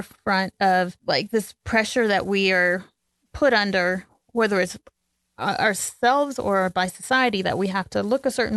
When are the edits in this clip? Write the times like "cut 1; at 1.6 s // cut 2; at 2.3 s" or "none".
cut 1; at 1.0 s